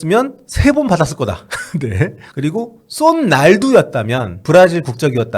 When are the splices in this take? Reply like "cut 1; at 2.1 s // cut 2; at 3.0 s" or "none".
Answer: cut 1; at 2.2 s // cut 2; at 4.4 s